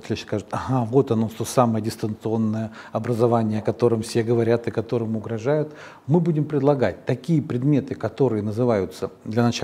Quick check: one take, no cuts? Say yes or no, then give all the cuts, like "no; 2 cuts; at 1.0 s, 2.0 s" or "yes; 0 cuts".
yes; 0 cuts